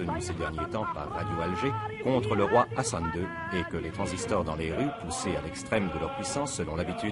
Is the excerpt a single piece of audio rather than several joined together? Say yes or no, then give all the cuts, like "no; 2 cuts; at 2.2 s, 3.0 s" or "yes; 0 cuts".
no; 1 cut; at 1.5 s